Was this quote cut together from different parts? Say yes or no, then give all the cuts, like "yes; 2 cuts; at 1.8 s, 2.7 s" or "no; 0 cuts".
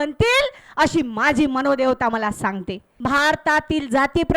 yes; 1 cut; at 2.9 s